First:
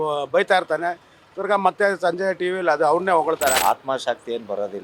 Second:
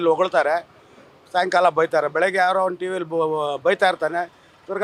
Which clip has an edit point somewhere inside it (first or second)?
first